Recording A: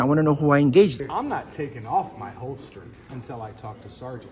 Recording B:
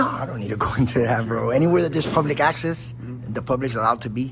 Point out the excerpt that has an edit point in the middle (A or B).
A